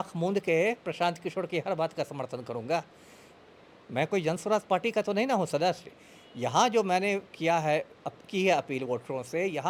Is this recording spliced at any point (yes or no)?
no